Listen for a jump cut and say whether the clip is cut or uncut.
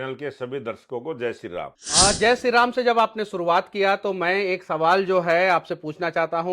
cut